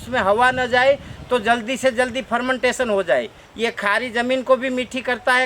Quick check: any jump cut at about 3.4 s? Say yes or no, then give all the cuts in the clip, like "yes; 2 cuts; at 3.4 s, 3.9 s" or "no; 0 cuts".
yes; 1 cut; at 3.4 s